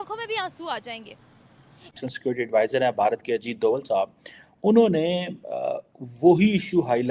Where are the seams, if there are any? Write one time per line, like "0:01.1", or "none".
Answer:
0:02.0